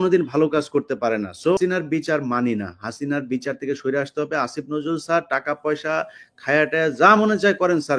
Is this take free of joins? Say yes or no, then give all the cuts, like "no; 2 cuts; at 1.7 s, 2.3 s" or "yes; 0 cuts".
no; 1 cut; at 1.6 s